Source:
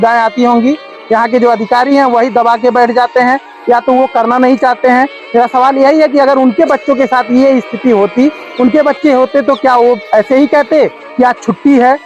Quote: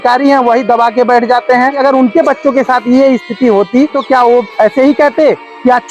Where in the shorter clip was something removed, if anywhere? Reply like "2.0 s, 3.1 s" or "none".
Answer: 1.8 s, 4.0 s